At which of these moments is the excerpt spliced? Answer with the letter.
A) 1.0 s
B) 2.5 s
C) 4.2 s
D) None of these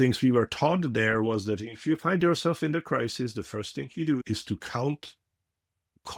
C